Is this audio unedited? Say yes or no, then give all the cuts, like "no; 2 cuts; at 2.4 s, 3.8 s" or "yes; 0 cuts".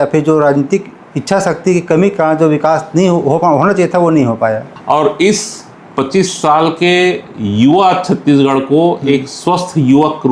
no; 1 cut; at 4.7 s